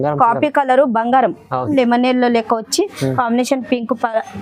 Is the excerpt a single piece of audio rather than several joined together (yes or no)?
no